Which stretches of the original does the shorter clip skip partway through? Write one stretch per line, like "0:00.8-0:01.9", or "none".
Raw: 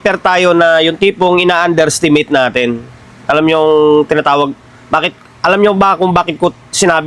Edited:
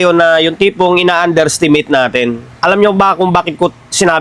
0:02.9-0:05.3